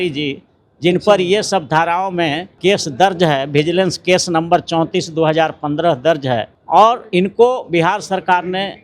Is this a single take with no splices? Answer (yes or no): no